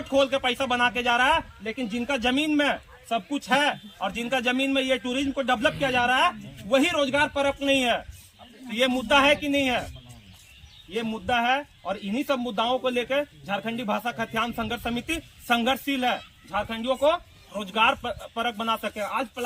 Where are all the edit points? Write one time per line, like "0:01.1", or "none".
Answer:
none